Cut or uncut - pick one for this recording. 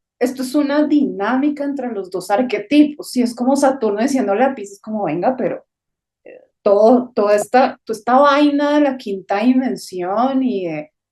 uncut